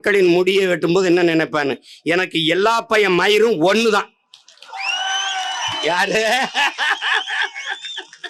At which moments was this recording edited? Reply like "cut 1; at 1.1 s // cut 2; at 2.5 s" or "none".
none